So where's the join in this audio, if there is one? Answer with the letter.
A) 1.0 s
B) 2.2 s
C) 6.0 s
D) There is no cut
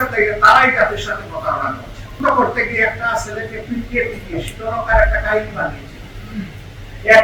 B